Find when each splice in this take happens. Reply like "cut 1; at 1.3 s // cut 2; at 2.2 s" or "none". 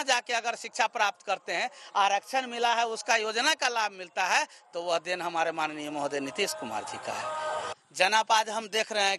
cut 1; at 7.7 s

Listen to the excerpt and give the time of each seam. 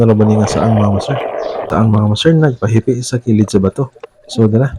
cut 1; at 1.7 s

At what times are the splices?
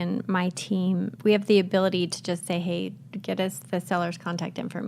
cut 1; at 1.1 s

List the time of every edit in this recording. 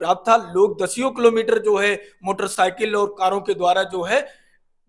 none

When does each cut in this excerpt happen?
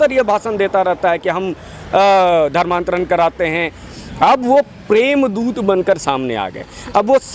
cut 1; at 3.8 s

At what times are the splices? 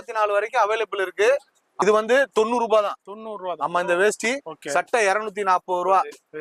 cut 1; at 1.7 s

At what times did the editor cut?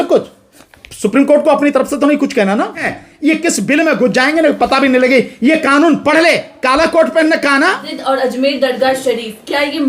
cut 1; at 3.0 s // cut 2; at 7.9 s

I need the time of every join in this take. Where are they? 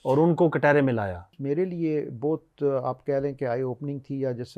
cut 1; at 1.3 s

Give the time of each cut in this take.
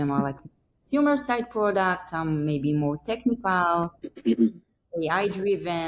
none

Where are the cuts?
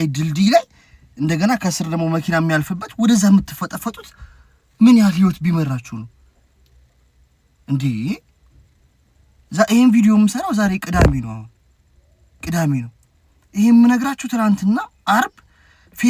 none

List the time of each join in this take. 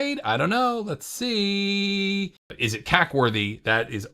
cut 1; at 2.4 s

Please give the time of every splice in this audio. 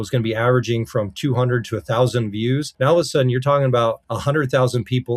cut 1; at 2.7 s // cut 2; at 4.1 s

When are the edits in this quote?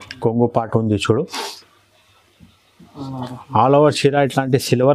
none

